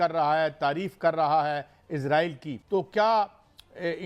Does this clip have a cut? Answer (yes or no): yes